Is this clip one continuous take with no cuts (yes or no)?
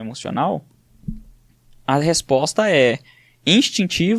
yes